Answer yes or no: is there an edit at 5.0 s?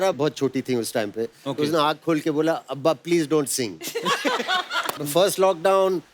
yes